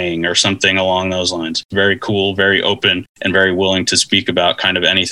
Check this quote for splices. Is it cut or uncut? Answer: cut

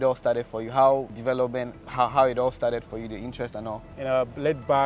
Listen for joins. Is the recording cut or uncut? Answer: cut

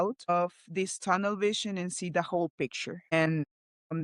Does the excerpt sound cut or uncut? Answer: uncut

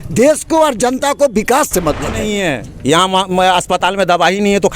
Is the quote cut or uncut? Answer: cut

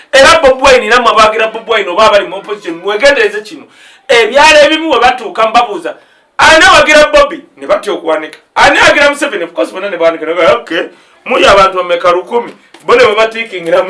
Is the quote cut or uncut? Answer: uncut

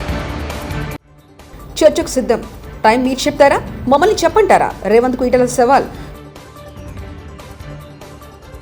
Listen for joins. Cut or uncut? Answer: cut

